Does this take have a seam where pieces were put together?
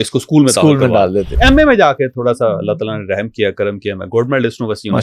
yes; 1 cut; at 1.4 s

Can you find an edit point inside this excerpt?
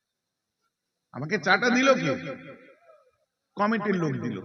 no; 0 cuts

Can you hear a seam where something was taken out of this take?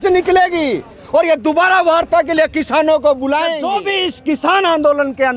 yes; 1 cut; at 3.6 s

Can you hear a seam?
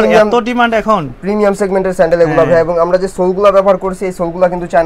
no; 0 cuts

